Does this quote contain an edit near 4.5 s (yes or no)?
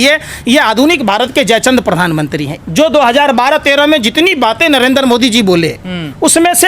no